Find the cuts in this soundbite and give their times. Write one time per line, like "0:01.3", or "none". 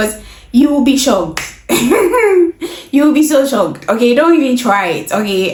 none

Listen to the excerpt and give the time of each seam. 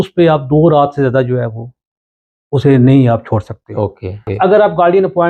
0:04.2

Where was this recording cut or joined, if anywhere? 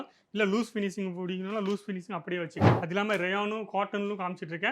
0:02.6

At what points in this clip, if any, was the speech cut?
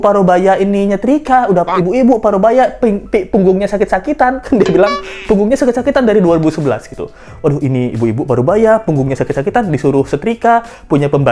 none

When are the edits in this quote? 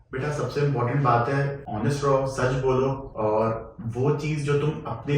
0:01.6
0:03.1

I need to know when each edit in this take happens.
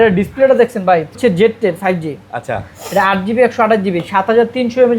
0:01.2

